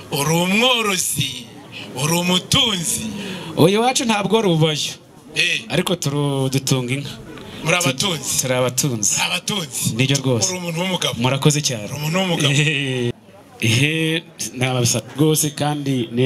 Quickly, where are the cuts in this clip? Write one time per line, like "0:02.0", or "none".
0:13.1